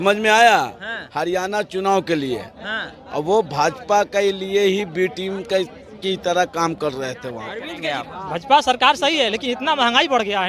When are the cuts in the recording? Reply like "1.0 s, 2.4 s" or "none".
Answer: 7.6 s